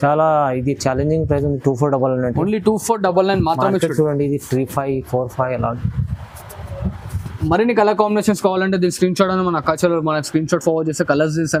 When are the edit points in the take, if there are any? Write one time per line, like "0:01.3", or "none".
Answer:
none